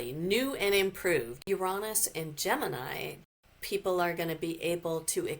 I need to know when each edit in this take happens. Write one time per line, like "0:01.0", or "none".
0:01.5
0:03.4